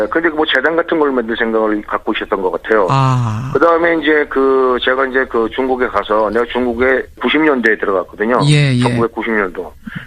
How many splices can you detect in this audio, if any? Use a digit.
0